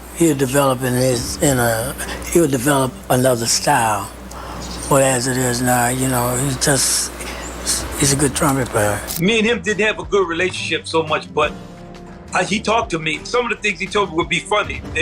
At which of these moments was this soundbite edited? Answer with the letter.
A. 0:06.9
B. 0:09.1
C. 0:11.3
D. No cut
B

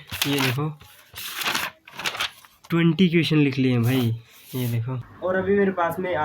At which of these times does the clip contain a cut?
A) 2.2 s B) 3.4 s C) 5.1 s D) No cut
C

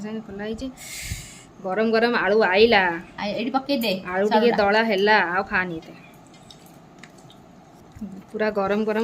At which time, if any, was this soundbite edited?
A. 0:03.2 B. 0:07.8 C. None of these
B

